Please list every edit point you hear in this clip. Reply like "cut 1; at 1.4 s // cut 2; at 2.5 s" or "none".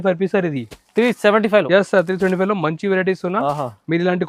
none